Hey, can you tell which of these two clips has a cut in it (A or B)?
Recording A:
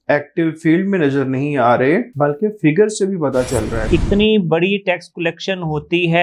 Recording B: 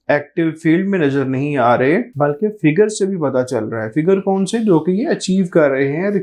A